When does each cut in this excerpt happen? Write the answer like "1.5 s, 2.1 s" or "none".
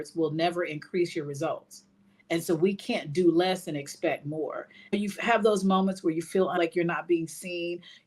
4.9 s, 6.6 s